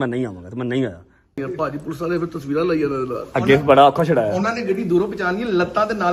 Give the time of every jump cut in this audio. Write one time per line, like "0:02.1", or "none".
0:01.4